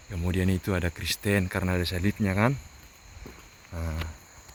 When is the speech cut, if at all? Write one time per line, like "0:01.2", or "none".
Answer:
none

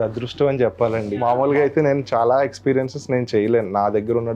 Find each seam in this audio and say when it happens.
0:01.1

